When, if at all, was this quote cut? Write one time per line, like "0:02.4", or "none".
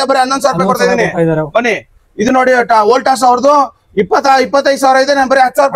none